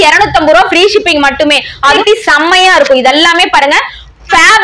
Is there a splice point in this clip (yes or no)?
no